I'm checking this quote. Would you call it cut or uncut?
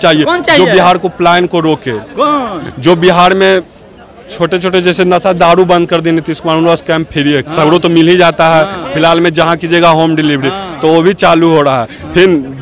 uncut